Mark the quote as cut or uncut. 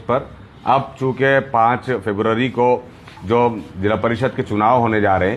uncut